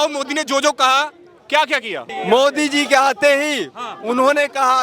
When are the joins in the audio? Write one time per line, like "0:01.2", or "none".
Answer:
0:02.1